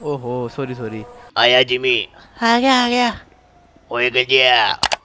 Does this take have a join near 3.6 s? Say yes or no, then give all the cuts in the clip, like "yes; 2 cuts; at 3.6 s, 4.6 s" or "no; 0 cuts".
no; 1 cut; at 1.2 s